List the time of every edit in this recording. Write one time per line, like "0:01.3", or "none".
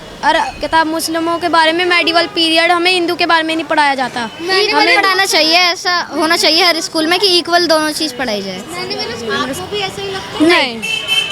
none